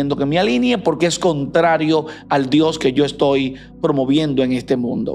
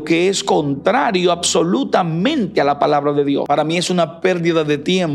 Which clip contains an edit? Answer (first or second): second